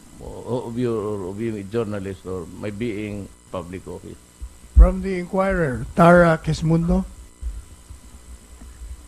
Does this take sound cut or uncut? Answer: cut